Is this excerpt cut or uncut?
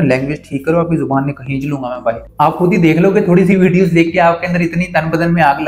cut